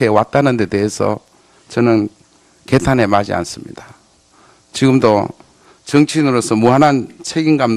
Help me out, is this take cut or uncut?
cut